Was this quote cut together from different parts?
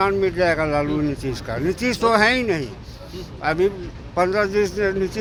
no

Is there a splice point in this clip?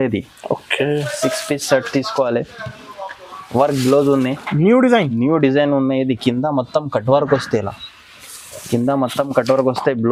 no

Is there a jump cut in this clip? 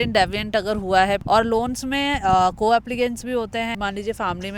yes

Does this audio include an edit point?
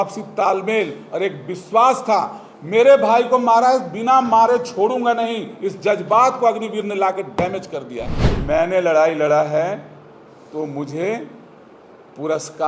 yes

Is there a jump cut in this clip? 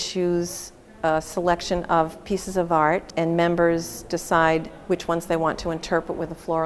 yes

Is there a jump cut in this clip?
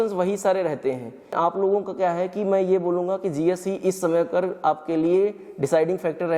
yes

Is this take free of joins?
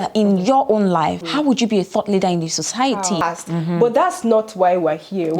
no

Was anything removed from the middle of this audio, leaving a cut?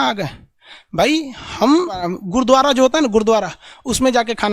yes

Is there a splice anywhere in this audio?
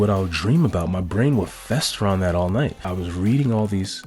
yes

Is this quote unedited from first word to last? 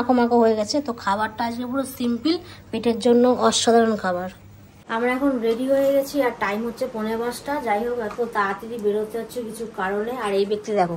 yes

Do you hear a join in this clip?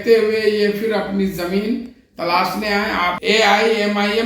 yes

